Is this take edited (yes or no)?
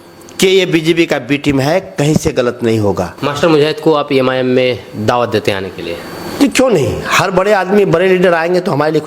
yes